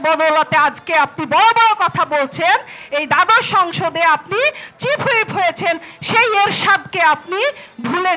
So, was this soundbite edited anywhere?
no; 0 cuts

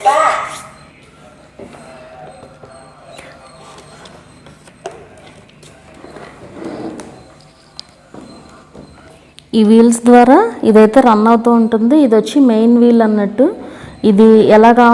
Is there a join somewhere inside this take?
no; 0 cuts

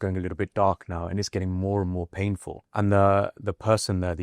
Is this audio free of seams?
no; 1 cut; at 2.6 s

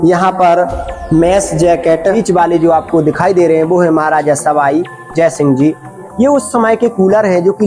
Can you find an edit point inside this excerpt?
yes; 2 cuts; at 2.0 s, 6.0 s

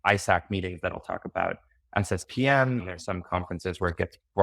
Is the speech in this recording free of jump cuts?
yes; 0 cuts

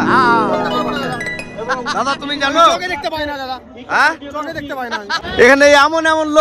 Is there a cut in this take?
yes; 1 cut; at 5.2 s

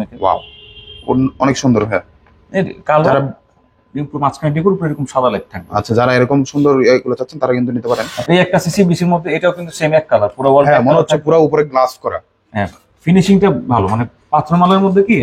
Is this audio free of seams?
no; 1 cut; at 8.1 s

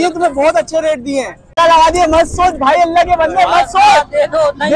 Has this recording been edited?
yes; 1 cut; at 1.6 s

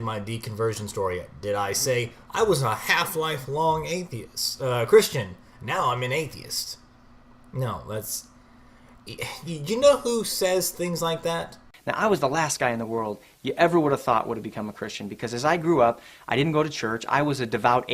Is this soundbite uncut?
no; 1 cut; at 3.0 s

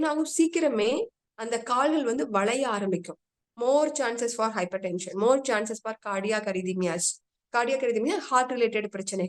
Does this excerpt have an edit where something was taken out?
yes; 1 cut; at 3.5 s

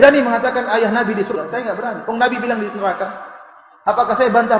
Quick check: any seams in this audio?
yes; 1 cut; at 1.3 s

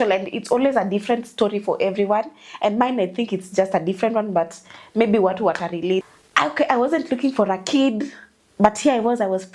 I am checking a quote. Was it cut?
yes; 1 cut; at 6.0 s

